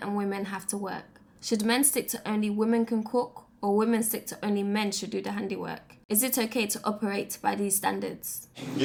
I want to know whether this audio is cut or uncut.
uncut